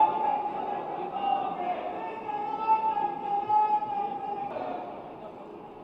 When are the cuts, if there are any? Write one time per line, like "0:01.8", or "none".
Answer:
0:04.5